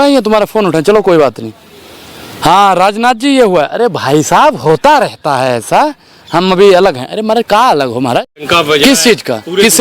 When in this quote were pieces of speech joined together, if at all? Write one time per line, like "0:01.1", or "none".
0:08.4